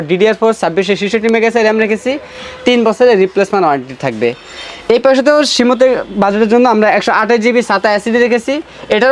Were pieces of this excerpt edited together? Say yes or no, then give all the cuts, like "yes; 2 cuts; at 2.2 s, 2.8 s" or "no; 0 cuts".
no; 0 cuts